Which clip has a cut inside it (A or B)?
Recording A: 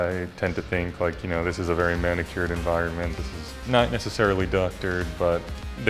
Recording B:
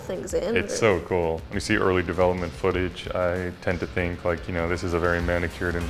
B